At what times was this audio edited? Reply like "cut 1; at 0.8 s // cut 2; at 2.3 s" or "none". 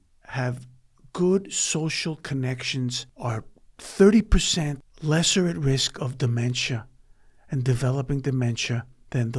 cut 1; at 3.1 s // cut 2; at 4.9 s